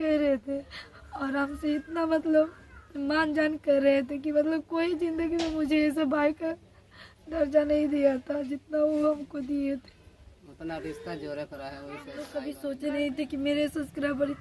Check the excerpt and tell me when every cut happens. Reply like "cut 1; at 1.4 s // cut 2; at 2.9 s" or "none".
cut 1; at 12.4 s